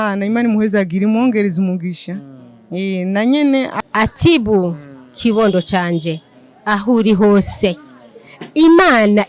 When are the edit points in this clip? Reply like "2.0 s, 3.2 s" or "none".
3.7 s